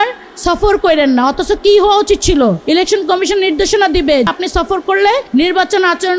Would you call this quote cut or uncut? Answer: cut